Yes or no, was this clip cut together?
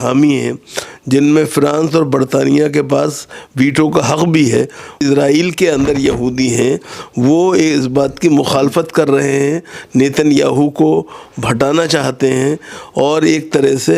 yes